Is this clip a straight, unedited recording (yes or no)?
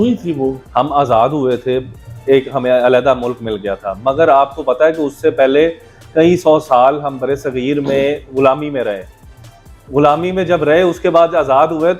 yes